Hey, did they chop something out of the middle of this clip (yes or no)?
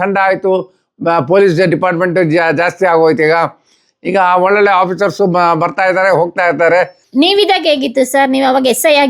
yes